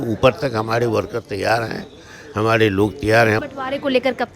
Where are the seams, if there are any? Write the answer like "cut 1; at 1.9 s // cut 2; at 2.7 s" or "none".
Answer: cut 1; at 3.4 s